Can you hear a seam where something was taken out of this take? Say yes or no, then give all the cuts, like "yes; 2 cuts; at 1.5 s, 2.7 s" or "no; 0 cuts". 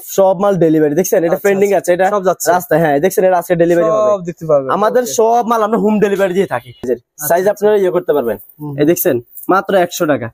yes; 1 cut; at 6.9 s